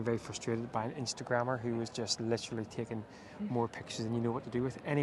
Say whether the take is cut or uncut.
uncut